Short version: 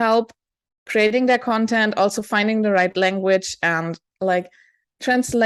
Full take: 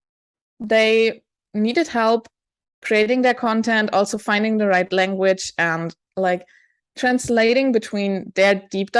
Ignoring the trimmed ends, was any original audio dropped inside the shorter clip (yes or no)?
no